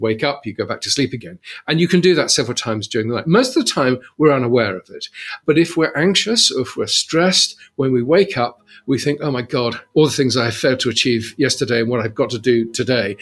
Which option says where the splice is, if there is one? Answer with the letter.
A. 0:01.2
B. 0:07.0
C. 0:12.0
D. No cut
A